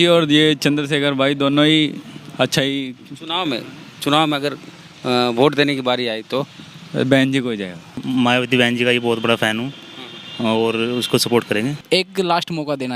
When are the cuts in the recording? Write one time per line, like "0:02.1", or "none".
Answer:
0:07.9
0:11.8